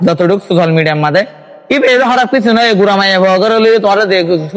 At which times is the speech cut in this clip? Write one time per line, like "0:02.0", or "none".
none